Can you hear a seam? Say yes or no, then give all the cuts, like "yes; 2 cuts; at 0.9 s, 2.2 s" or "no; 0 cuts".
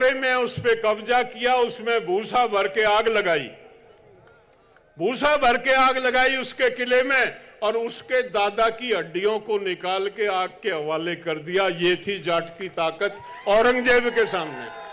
no; 0 cuts